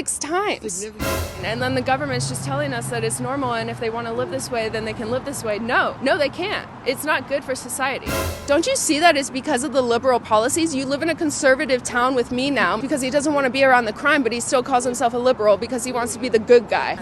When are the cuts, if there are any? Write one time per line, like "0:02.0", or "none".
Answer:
0:01.1
0:08.2
0:12.8

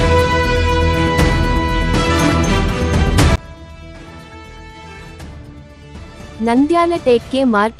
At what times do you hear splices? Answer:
none

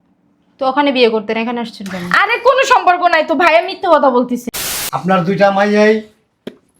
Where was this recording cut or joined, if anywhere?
0:04.4

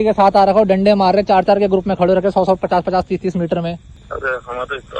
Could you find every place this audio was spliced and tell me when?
0:03.9

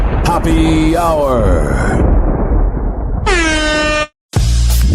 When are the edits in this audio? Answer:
0:04.1

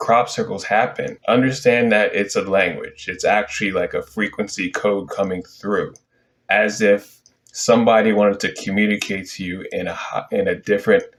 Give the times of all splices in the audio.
none

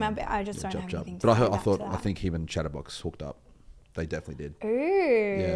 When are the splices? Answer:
none

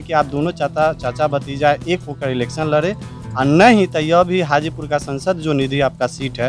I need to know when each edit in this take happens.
none

